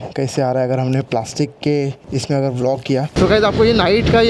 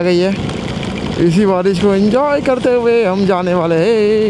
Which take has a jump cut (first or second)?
first